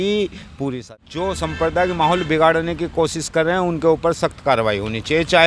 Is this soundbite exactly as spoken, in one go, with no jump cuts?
no; 1 cut; at 0.9 s

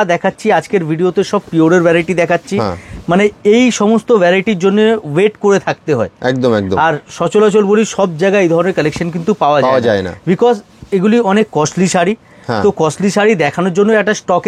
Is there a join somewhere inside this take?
no; 0 cuts

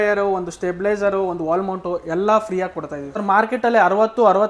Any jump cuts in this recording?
no; 0 cuts

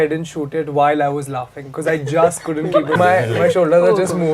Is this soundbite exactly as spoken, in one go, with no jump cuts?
no; 1 cut; at 3.0 s

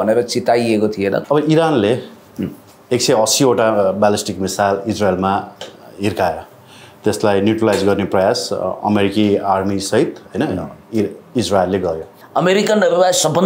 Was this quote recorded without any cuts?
no; 2 cuts; at 1.2 s, 12.2 s

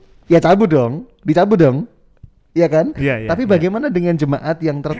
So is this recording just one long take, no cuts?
yes; 0 cuts

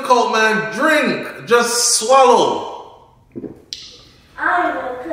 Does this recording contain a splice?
no; 0 cuts

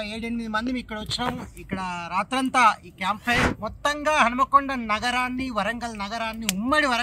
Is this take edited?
yes; 1 cut; at 3.5 s

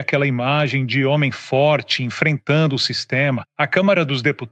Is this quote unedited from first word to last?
no; 1 cut; at 3.5 s

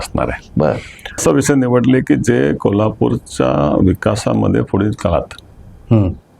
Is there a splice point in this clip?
yes; 1 cut; at 1.2 s

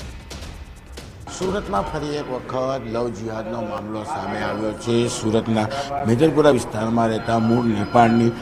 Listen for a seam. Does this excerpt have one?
no; 0 cuts

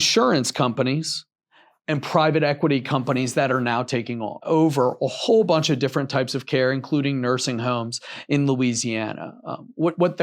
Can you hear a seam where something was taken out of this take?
yes; 1 cut; at 4.4 s

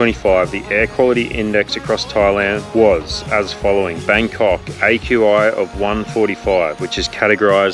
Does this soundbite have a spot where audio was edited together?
no; 0 cuts

